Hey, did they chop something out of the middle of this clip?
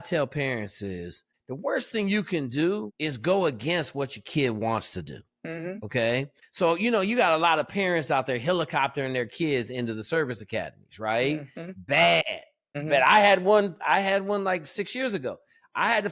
no; 0 cuts

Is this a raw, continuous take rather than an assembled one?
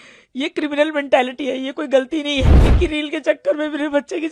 no; 1 cut; at 2.7 s

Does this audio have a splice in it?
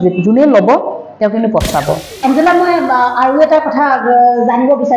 yes; 1 cut; at 2.1 s

